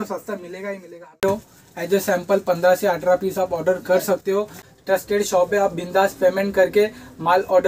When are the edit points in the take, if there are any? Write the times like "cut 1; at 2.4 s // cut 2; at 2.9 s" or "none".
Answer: cut 1; at 1.2 s // cut 2; at 4.6 s